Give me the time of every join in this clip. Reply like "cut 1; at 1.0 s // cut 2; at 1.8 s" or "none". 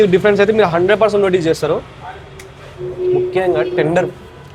none